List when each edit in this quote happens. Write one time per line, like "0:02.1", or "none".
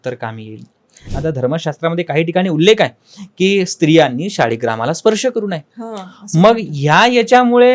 0:01.0